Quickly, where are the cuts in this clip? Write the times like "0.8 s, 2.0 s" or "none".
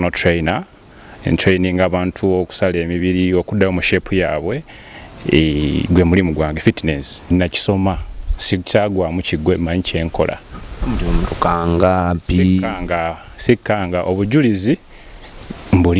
7.3 s